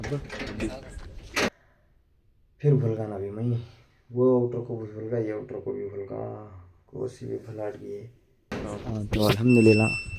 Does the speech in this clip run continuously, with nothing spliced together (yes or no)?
no